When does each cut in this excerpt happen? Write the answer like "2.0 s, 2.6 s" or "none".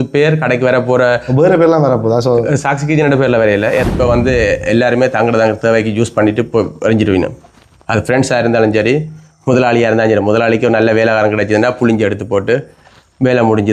3.8 s